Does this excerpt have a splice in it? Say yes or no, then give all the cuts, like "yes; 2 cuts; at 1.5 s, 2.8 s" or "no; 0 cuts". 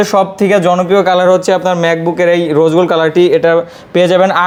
no; 0 cuts